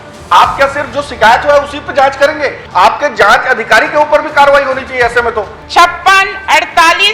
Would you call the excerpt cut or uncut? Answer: cut